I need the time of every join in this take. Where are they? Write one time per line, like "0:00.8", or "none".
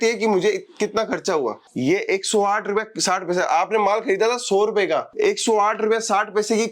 0:01.6